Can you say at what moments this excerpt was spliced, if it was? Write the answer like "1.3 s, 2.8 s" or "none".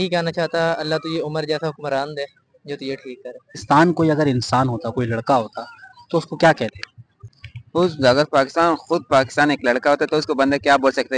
3.6 s